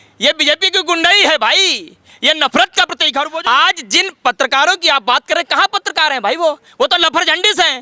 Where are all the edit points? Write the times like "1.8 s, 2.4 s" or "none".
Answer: 3.3 s